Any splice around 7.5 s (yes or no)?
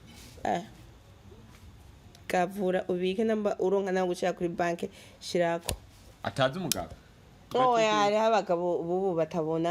yes